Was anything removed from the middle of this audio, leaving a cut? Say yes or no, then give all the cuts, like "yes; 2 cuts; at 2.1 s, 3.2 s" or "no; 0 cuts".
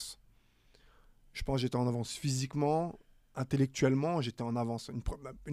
no; 0 cuts